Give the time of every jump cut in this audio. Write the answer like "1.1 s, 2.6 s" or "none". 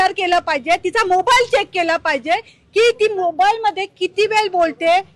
none